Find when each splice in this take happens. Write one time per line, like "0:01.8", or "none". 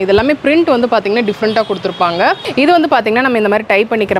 0:02.4